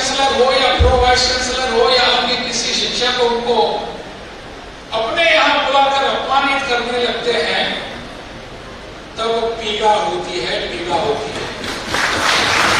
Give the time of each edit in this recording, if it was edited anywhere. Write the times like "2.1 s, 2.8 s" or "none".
none